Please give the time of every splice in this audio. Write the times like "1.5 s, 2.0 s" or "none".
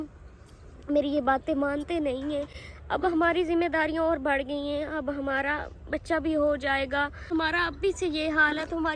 7.3 s